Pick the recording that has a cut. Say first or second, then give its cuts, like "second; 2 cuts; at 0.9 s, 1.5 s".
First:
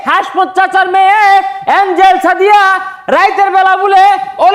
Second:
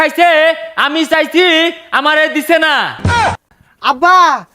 second; 1 cut; at 3.2 s